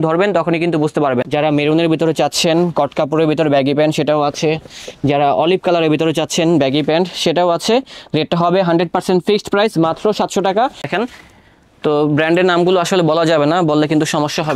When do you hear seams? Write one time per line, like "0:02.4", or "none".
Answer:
0:01.3
0:10.9